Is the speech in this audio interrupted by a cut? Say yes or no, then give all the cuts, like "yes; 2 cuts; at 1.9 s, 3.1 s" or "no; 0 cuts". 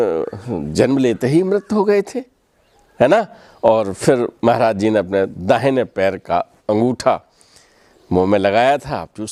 no; 0 cuts